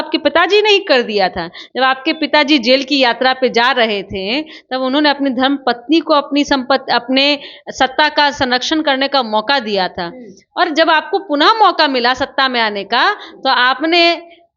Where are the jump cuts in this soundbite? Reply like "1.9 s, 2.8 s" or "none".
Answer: none